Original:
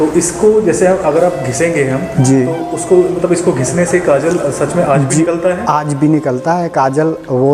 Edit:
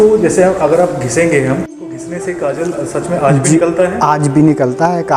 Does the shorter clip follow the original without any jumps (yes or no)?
no